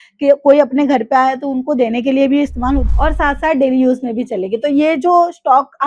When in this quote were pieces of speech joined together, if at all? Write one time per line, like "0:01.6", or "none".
0:02.9